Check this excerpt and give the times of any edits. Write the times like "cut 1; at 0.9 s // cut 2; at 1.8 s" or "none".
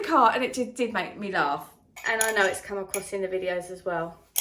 cut 1; at 1.9 s